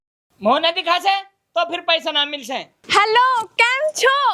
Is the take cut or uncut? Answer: cut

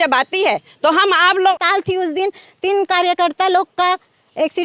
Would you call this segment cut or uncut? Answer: cut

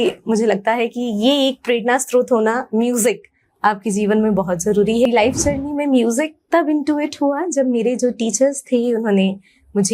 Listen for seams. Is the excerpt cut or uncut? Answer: cut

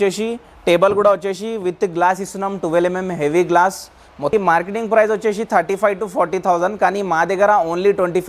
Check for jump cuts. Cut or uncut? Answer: cut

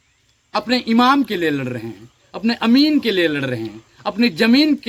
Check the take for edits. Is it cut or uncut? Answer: uncut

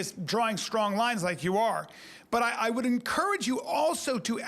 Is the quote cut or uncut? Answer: uncut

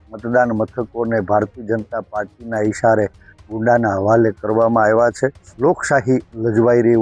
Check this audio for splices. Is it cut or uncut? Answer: cut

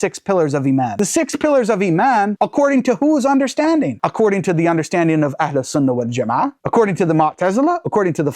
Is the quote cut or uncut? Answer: cut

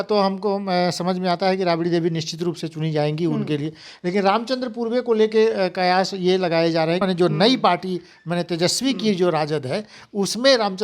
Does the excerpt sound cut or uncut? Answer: cut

